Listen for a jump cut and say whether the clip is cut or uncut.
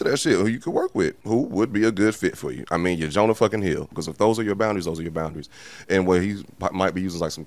cut